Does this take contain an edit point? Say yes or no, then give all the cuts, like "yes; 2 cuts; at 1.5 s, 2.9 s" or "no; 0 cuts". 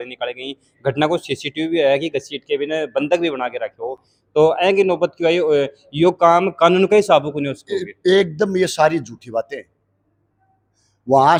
no; 0 cuts